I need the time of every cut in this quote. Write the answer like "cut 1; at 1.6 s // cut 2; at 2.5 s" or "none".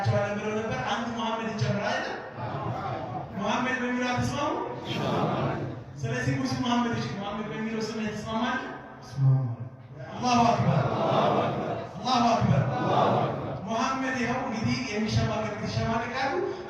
none

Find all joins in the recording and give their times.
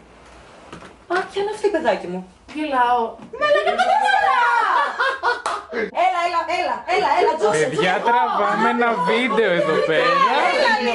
cut 1; at 3.3 s // cut 2; at 5.9 s

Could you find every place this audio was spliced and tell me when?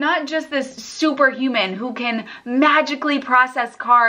none

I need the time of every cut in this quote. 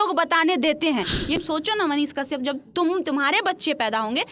cut 1; at 1.4 s

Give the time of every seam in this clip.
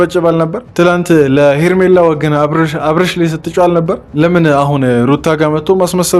none

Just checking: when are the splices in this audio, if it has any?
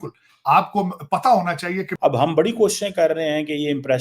cut 1; at 1.9 s

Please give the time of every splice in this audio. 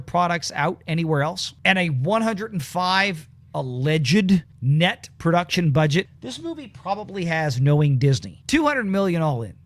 cut 1; at 1.5 s // cut 2; at 4.6 s // cut 3; at 6.1 s // cut 4; at 8.3 s

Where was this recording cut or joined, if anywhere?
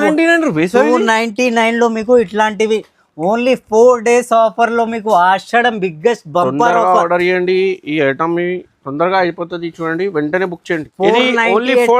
cut 1; at 10.8 s

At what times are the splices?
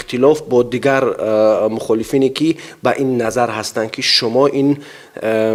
none

